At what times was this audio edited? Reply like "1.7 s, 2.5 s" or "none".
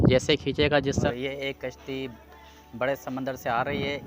1.1 s